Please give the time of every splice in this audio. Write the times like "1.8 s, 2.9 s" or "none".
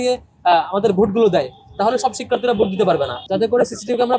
3.2 s